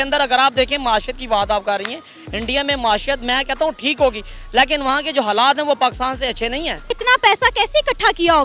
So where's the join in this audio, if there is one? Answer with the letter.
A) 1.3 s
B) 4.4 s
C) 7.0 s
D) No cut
C